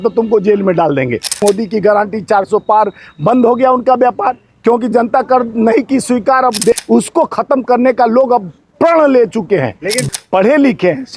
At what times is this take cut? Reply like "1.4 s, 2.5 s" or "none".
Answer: 1.4 s, 6.7 s, 10.1 s